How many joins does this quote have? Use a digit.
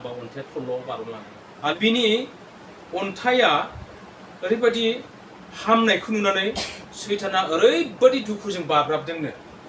1